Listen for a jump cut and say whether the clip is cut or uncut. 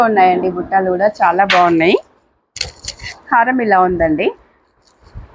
uncut